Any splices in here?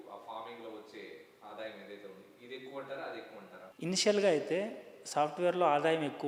no; 0 cuts

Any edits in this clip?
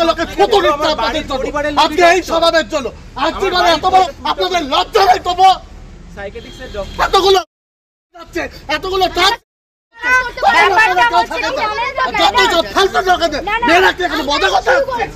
yes; 1 cut; at 4.1 s

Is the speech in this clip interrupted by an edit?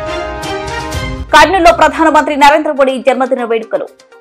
yes; 1 cut; at 1.1 s

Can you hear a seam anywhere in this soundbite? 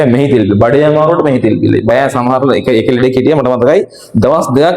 yes; 1 cut; at 1.9 s

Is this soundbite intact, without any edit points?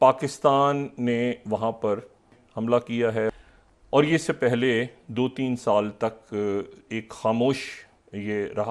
no; 2 cuts; at 2.4 s, 3.3 s

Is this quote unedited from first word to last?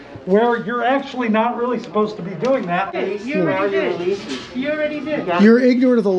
no; 1 cut; at 2.9 s

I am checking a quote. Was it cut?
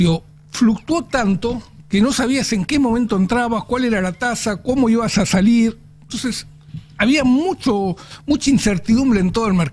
no; 0 cuts

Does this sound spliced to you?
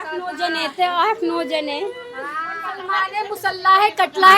yes; 1 cut; at 2.7 s

